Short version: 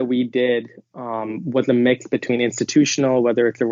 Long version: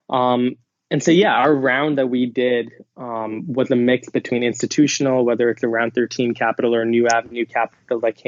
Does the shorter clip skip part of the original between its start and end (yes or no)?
no